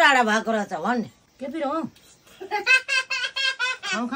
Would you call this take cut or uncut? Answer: cut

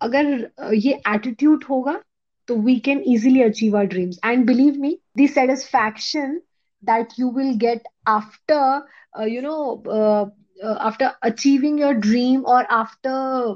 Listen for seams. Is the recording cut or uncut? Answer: cut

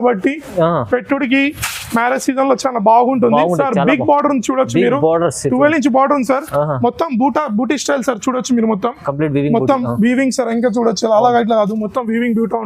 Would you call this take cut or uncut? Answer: uncut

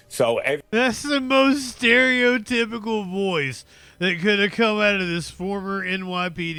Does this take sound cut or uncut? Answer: uncut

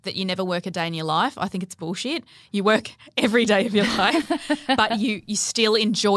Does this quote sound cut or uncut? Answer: uncut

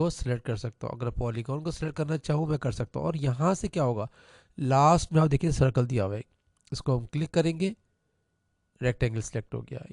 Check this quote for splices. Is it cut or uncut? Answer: uncut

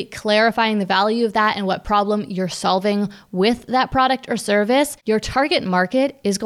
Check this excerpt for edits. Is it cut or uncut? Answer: cut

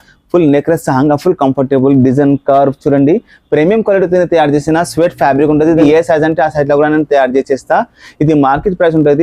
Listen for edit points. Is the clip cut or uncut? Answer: cut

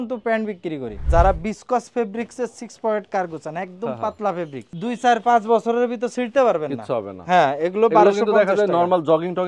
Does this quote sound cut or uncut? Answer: cut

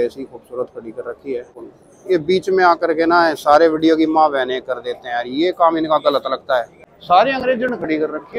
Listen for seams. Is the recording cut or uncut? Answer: cut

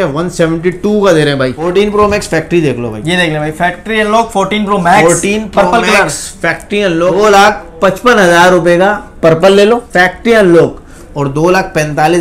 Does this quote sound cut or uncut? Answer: cut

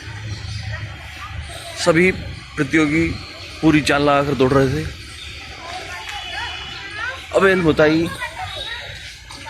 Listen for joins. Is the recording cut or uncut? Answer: uncut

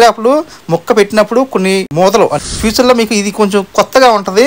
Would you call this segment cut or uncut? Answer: cut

